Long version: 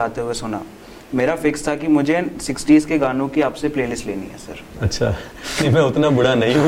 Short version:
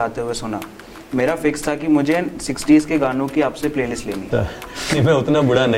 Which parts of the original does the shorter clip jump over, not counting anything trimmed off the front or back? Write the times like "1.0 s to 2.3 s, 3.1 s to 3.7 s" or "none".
4.2 s to 4.9 s

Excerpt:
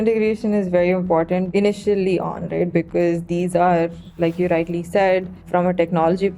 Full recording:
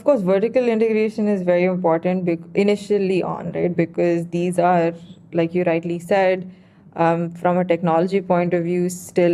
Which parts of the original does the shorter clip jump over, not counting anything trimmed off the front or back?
2.2 s to 2.5 s, 5.1 s to 5.2 s, 6.5 s to 7.3 s

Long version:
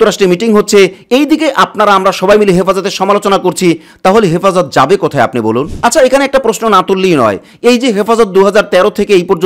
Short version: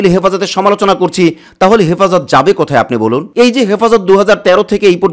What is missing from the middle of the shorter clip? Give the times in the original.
5.7 s to 7.5 s

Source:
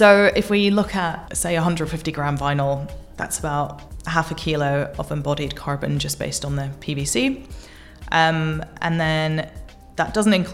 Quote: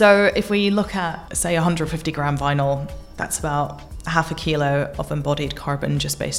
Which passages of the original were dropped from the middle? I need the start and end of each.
none

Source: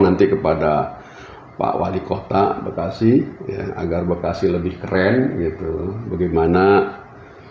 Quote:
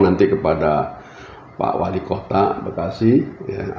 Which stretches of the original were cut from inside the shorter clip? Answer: none

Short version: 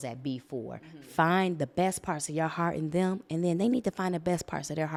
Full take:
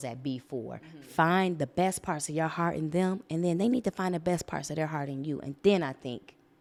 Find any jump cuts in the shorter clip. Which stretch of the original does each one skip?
none

